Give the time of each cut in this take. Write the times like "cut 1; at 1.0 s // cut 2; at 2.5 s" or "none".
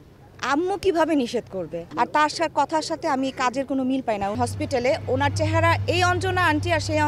cut 1; at 1.8 s // cut 2; at 4.4 s